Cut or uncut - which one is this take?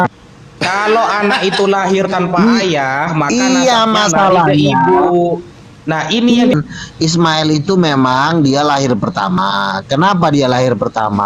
cut